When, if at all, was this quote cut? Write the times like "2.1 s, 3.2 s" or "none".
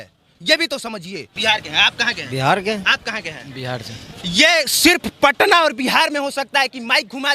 1.3 s